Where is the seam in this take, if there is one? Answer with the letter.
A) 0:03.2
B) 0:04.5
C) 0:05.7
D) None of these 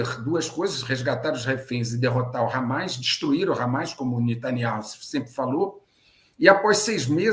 D